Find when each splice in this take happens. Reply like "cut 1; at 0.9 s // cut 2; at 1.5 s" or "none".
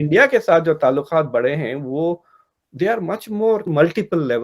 none